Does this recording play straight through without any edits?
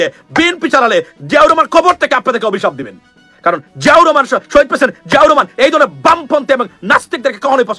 yes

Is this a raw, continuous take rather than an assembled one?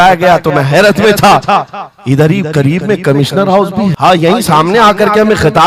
no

